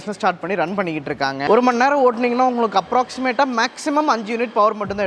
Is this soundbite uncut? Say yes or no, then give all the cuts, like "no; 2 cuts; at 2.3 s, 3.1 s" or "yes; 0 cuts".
no; 1 cut; at 1.4 s